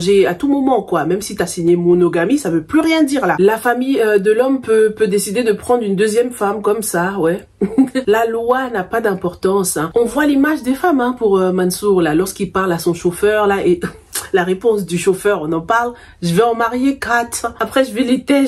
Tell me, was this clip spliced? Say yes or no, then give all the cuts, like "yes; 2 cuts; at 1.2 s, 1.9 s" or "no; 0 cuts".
no; 0 cuts